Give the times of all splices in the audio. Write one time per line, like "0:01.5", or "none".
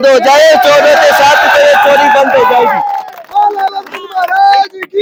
none